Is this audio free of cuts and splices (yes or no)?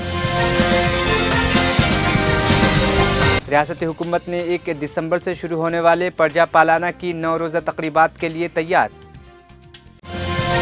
no